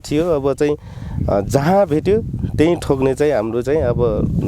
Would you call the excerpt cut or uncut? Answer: uncut